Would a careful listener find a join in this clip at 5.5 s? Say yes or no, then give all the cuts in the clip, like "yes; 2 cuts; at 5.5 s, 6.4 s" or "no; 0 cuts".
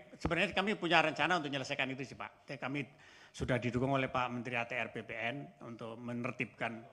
no; 0 cuts